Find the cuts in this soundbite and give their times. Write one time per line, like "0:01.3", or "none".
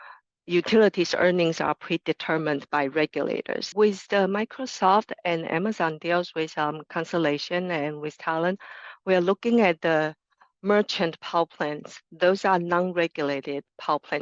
0:03.7